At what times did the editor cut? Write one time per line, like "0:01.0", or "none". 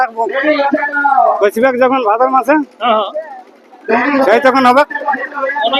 none